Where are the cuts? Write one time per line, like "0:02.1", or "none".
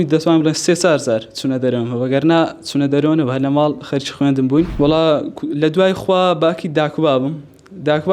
0:04.7